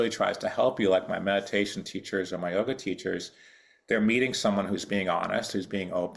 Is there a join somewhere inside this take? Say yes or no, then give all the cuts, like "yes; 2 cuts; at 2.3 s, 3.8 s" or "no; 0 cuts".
no; 0 cuts